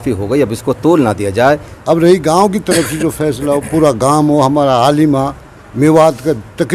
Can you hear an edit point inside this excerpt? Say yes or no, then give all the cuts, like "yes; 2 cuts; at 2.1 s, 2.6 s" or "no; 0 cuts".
yes; 1 cut; at 1.7 s